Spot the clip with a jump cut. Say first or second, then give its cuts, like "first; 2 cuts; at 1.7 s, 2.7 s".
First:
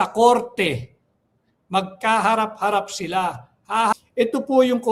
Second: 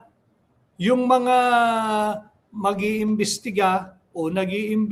first; 1 cut; at 3.9 s